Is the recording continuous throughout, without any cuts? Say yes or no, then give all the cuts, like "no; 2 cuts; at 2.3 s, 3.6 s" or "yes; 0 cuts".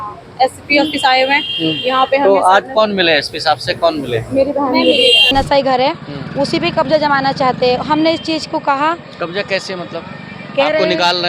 no; 1 cut; at 5.3 s